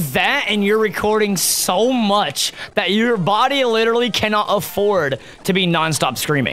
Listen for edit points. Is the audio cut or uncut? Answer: uncut